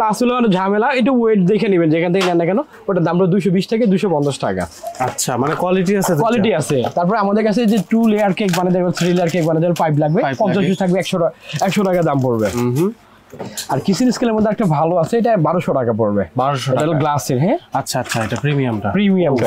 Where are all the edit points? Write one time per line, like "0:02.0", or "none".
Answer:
none